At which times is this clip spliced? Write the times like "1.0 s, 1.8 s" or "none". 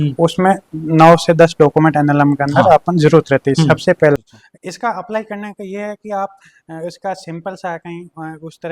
4.2 s